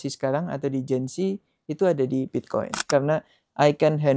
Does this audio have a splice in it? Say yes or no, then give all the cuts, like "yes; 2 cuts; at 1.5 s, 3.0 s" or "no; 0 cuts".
yes; 1 cut; at 2.9 s